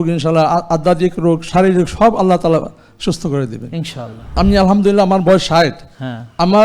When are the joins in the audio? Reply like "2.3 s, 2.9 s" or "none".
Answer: 4.4 s

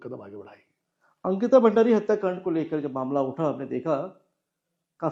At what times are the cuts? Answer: none

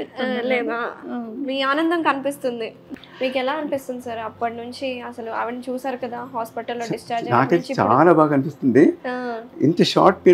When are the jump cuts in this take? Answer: 2.9 s

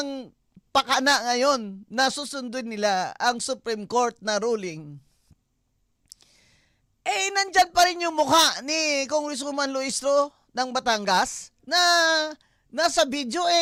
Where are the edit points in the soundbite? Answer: none

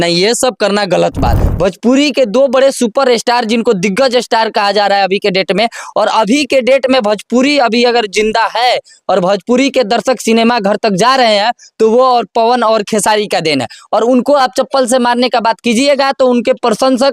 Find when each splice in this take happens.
1.5 s

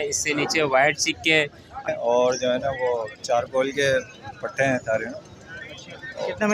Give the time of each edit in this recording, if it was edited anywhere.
1.9 s

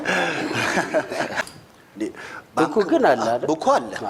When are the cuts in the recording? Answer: 1.4 s

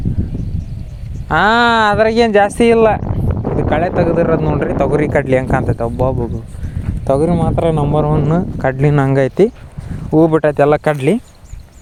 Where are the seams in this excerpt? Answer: none

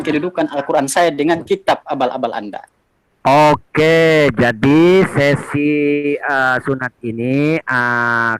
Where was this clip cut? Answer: none

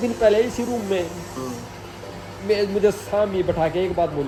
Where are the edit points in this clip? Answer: none

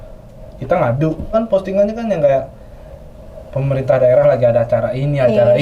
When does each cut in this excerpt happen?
1.3 s

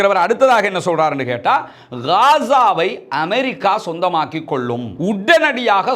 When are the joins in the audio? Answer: 4.9 s

